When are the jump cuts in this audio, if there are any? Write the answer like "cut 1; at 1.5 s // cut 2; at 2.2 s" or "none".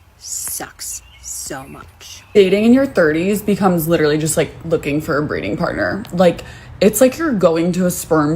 cut 1; at 2.2 s